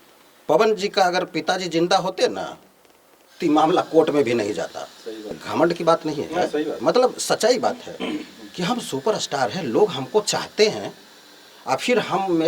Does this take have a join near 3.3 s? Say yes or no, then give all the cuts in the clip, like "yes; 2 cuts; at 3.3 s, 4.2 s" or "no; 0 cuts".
no; 1 cut; at 5.4 s